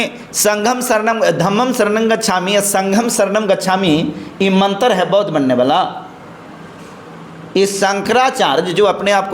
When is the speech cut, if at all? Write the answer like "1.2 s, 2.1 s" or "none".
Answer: none